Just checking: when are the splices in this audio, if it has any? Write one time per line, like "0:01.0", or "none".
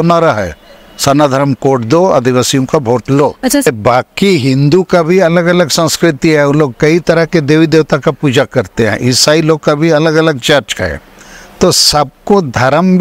0:03.7